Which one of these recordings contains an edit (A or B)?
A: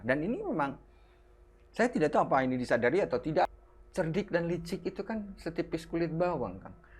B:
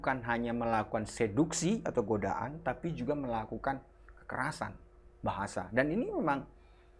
A